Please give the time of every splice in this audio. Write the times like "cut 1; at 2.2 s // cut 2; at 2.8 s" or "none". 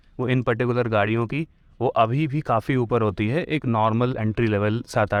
none